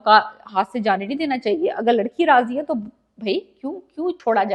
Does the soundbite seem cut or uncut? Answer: uncut